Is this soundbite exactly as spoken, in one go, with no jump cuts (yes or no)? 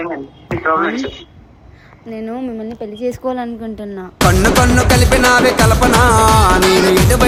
yes